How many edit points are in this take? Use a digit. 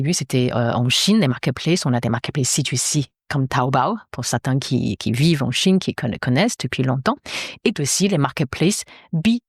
0